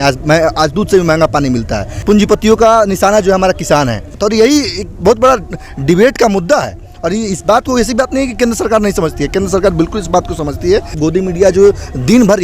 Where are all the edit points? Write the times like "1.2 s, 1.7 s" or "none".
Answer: 1.9 s, 4.2 s, 10.9 s